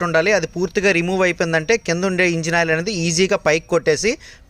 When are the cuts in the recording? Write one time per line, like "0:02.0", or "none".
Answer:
none